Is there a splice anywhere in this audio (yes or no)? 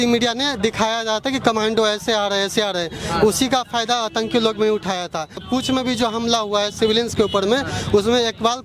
yes